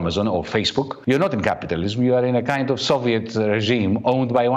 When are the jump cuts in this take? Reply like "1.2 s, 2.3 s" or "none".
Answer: 0.9 s